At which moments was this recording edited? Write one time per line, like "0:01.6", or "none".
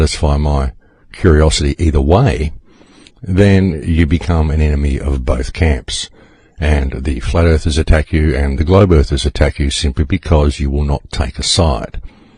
0:01.9